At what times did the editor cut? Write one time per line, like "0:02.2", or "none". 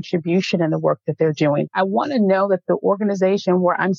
0:01.7